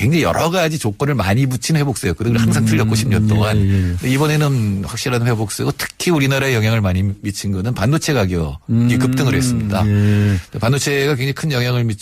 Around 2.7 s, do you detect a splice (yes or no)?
no